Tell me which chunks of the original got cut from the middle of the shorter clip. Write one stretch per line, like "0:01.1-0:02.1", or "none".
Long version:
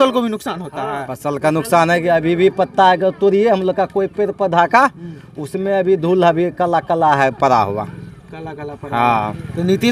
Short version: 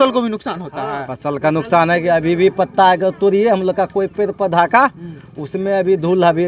none